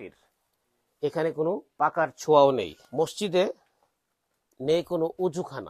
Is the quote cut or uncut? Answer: cut